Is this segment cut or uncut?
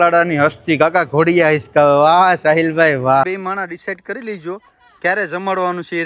cut